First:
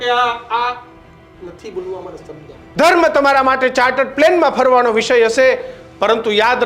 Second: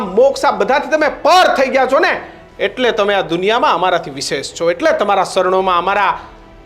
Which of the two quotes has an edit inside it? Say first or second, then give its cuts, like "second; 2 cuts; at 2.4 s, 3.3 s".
first; 1 cut; at 2.6 s